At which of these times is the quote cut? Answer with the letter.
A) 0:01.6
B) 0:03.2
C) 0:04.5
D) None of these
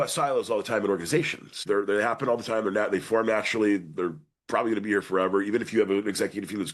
A